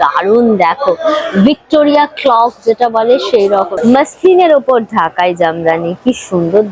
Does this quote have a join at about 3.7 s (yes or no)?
yes